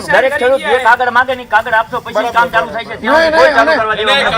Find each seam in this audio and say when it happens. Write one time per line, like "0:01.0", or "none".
none

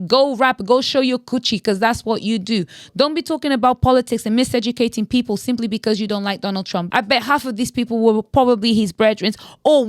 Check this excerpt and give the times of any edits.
0:06.9

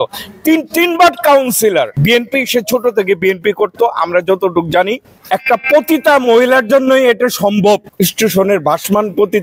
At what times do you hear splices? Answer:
0:01.9
0:05.1
0:07.9

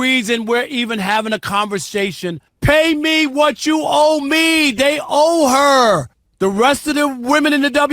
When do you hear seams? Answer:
0:02.5
0:06.2

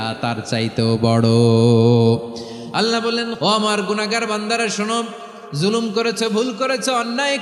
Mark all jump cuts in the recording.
0:03.3

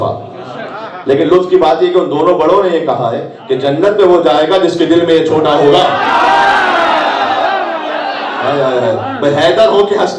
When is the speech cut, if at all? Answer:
0:08.3

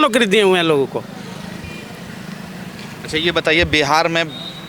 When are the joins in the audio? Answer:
none

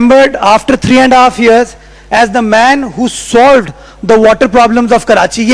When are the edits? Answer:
none

